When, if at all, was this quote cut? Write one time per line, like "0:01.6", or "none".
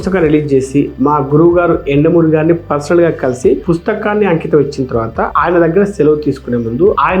none